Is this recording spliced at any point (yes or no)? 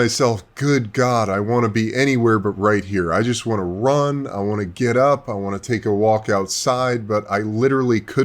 no